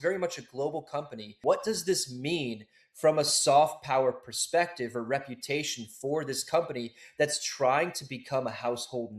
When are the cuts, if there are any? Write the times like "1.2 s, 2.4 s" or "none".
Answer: 1.4 s